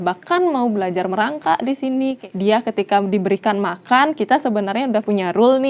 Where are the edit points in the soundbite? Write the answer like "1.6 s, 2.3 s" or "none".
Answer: 2.2 s